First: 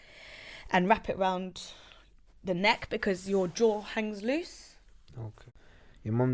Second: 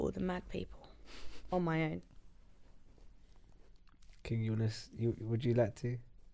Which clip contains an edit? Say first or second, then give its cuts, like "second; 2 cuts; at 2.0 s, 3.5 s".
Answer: first; 1 cut; at 5.4 s